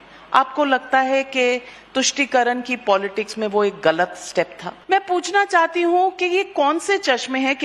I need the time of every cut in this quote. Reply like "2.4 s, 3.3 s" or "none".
4.7 s